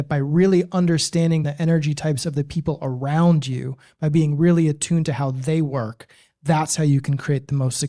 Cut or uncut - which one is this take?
cut